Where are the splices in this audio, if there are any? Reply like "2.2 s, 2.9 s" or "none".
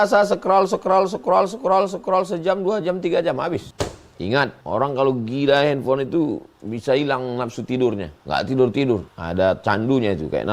3.7 s, 4.6 s, 8.1 s, 9.2 s